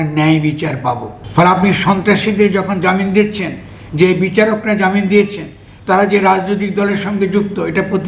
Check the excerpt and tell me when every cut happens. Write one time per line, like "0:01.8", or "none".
none